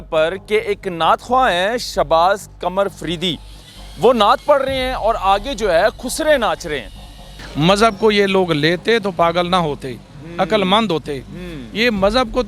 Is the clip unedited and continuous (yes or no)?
no